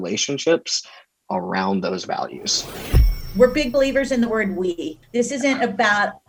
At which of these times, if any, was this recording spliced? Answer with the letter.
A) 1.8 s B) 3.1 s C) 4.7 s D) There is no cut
B